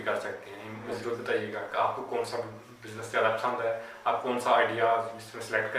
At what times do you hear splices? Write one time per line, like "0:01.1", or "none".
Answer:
0:00.9